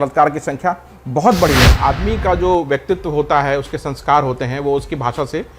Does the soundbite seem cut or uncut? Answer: cut